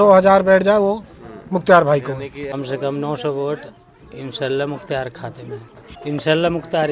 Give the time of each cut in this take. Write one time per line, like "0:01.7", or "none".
0:02.5
0:05.9